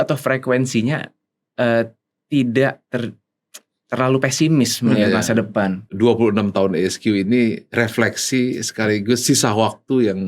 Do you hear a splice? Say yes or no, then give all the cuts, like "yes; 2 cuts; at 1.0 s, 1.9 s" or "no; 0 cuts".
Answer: yes; 1 cut; at 5.9 s